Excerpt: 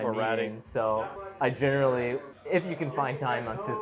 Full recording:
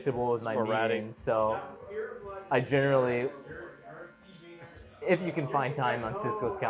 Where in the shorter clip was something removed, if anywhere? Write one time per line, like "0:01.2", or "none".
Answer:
0:01.2
0:02.3